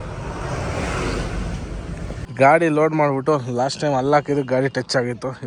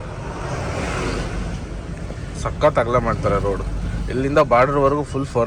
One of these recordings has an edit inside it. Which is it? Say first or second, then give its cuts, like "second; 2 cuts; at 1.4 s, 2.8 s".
first; 1 cut; at 2.2 s